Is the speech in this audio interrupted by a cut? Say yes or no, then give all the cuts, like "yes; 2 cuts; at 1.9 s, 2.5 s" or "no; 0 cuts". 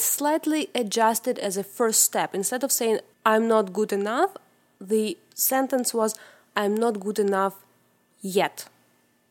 yes; 1 cut; at 3.1 s